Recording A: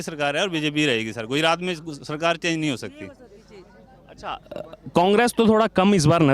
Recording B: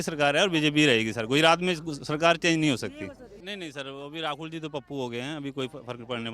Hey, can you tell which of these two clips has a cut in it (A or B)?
B